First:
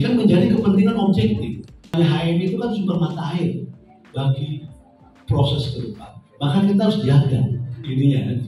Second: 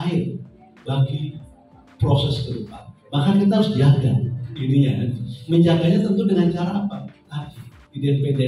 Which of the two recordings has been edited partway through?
first; 1 cut; at 1.9 s

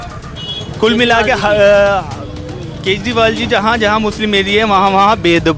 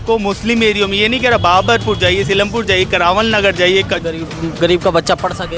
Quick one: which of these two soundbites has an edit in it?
second; 1 cut; at 4.0 s

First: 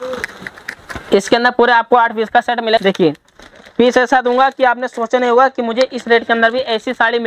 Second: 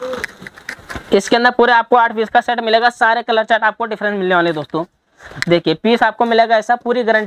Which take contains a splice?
first; 1 cut; at 2.8 s

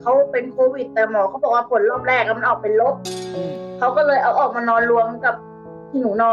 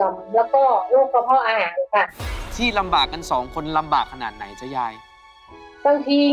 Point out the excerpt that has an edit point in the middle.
second; 1 cut; at 2.4 s

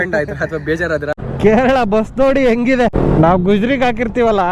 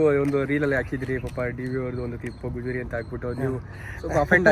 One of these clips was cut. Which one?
first; 2 cuts; at 1.1 s, 3.0 s

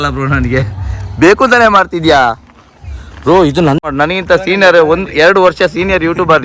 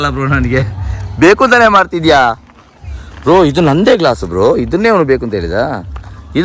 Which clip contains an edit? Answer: first; 1 cut; at 3.8 s

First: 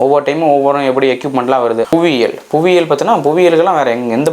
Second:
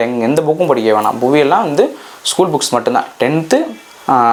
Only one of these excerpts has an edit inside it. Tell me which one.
first; 1 cut; at 1.9 s

